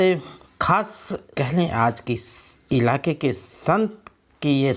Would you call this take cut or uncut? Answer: cut